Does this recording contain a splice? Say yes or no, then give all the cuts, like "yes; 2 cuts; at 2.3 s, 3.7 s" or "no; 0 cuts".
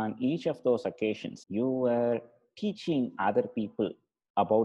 yes; 1 cut; at 1.3 s